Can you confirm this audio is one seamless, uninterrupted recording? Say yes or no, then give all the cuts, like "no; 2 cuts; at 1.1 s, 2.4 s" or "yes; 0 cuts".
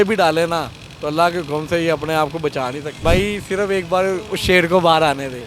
no; 1 cut; at 2.9 s